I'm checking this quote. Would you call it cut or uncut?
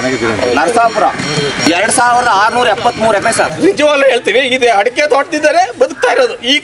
cut